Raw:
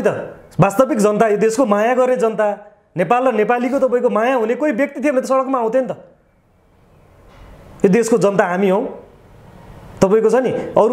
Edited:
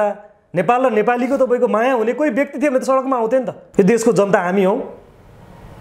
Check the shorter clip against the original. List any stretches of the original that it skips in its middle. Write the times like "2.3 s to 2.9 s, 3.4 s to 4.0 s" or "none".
6.0 s to 7.6 s